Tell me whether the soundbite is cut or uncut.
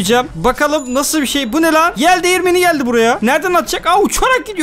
uncut